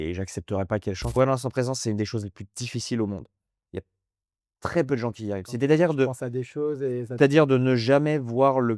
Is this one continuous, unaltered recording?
no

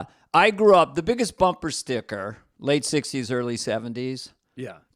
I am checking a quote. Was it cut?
no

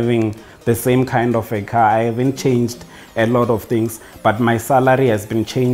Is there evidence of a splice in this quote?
no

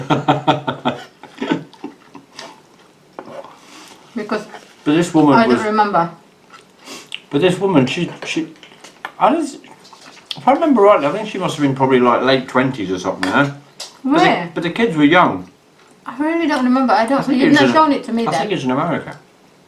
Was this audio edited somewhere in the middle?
no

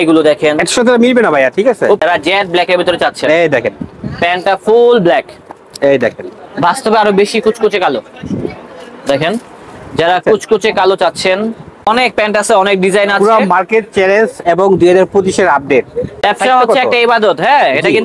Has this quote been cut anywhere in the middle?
yes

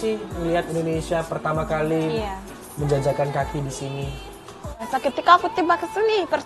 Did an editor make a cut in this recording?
yes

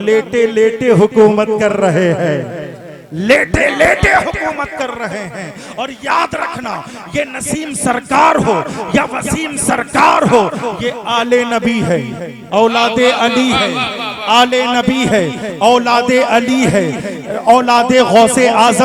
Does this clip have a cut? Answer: no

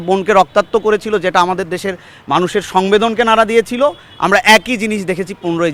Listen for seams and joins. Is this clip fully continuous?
yes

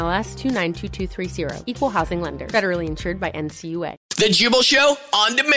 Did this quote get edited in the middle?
yes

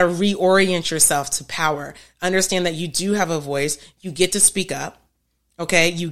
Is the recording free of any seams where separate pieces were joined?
yes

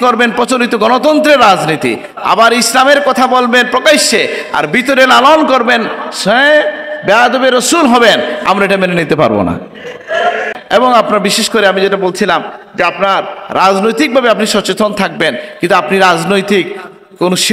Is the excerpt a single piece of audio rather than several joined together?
no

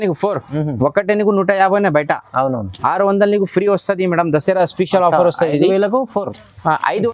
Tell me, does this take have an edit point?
no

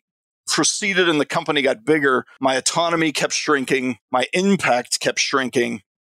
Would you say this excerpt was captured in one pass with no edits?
no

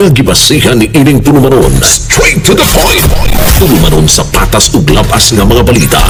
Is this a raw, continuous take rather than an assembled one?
yes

